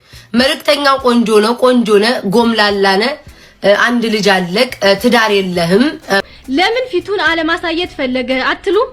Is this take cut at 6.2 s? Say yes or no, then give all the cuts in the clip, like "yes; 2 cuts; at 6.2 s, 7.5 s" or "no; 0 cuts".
yes; 1 cut; at 6.2 s